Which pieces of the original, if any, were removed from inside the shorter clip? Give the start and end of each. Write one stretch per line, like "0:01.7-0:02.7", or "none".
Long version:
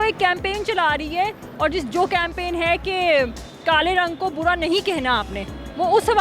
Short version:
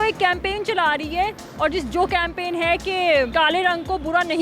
0:03.3-0:03.6